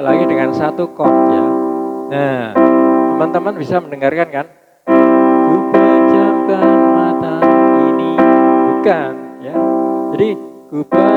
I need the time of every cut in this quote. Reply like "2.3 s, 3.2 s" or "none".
none